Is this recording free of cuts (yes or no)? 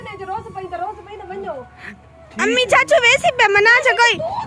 yes